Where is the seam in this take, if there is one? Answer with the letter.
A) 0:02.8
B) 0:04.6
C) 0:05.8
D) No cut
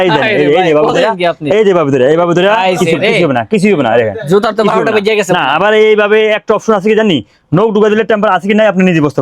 D